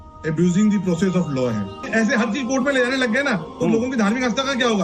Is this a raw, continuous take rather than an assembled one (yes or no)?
no